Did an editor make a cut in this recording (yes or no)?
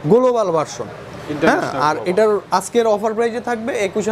no